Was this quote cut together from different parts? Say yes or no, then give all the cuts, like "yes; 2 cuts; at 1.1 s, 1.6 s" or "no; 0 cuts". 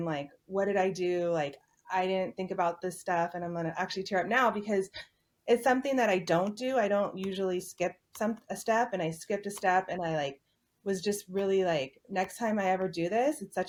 no; 0 cuts